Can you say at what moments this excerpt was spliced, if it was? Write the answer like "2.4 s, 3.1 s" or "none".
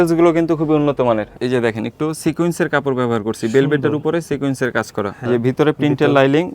1.3 s, 5.2 s

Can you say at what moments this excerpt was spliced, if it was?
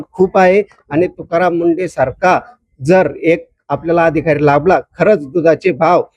none

